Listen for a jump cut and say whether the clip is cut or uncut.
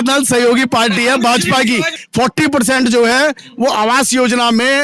cut